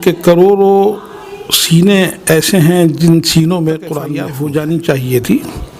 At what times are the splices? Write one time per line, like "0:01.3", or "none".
0:04.0